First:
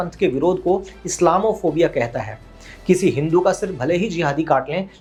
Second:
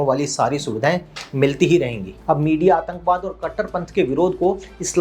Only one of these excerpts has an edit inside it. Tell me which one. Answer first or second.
second